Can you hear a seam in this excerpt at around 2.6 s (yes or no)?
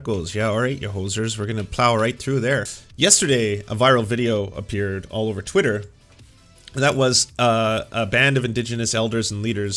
yes